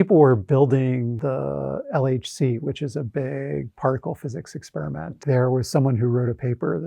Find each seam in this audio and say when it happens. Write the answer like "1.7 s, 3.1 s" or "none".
1.2 s, 5.2 s